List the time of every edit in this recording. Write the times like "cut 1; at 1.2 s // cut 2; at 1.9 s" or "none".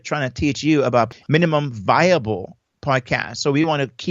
cut 1; at 1.1 s